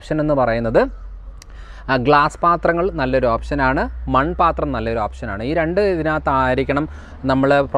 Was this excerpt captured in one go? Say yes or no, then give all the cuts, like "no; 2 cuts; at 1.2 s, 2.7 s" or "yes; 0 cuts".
yes; 0 cuts